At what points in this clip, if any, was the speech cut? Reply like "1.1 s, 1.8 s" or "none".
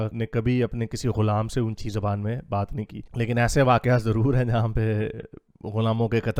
none